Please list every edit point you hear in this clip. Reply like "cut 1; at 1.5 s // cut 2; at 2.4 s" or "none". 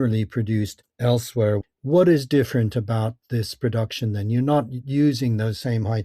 cut 1; at 1.6 s